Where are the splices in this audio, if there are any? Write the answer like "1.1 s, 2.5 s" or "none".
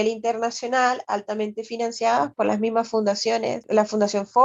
2.3 s, 3.6 s